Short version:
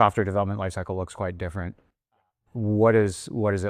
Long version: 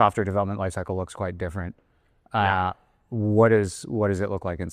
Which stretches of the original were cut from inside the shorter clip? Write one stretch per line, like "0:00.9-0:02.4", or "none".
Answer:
0:02.2-0:02.8